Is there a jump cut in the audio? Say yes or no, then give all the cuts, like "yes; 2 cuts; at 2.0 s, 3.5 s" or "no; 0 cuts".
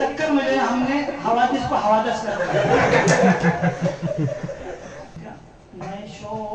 yes; 1 cut; at 5.1 s